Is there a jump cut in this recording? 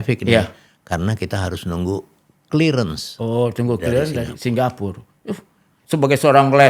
no; 0 cuts

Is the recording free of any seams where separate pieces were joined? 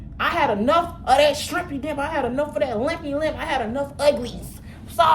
yes; 0 cuts

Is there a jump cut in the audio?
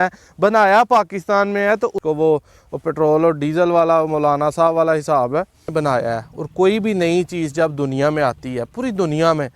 yes; 2 cuts; at 2.0 s, 5.7 s

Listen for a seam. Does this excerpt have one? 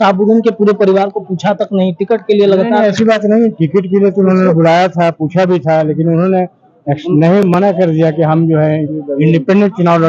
no; 0 cuts

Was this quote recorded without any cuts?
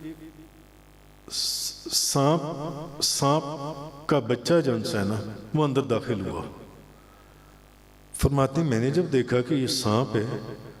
yes; 0 cuts

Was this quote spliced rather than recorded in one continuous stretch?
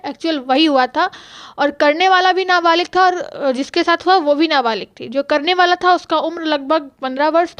no; 0 cuts

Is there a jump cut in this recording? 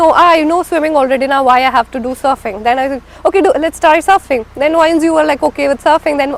no; 0 cuts

